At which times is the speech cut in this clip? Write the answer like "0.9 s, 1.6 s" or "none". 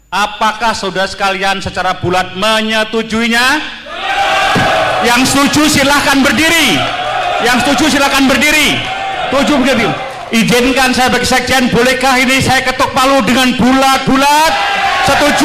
none